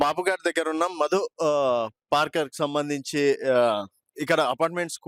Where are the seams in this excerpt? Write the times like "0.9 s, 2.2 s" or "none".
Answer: none